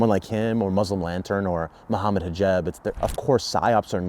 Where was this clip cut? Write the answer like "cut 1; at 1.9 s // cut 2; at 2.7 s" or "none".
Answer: cut 1; at 3.0 s